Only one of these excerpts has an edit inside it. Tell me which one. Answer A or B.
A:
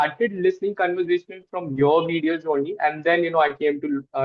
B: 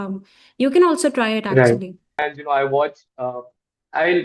B